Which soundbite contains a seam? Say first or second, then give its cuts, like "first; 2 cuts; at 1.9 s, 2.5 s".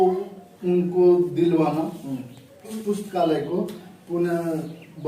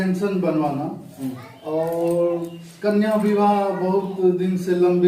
first; 1 cut; at 2.7 s